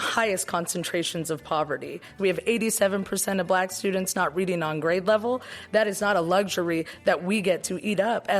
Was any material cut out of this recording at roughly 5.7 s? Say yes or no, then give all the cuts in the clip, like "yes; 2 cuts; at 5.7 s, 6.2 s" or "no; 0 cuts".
no; 1 cut; at 2.1 s